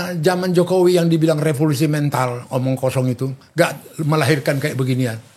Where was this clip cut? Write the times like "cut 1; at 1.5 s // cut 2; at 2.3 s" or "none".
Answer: none